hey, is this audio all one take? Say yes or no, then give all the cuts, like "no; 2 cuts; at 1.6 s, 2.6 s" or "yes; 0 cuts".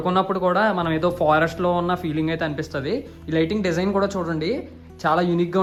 yes; 0 cuts